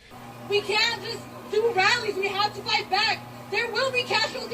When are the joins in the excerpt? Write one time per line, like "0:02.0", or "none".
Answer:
0:01.6

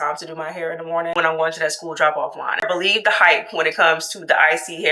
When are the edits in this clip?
0:01.1
0:02.6

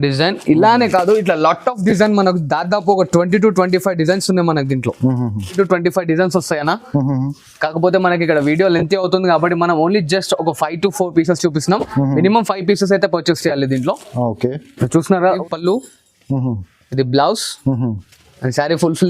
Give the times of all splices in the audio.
0:05.6
0:15.4

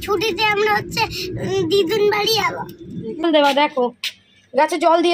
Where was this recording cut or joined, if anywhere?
0:03.2

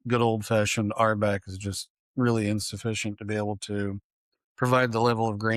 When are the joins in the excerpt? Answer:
none

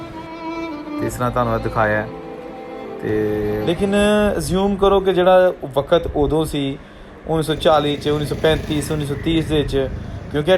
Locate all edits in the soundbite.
0:03.6

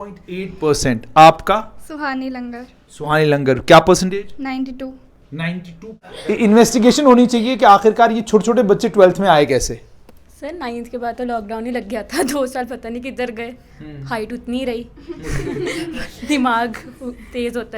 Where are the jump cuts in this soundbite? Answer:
0:05.9

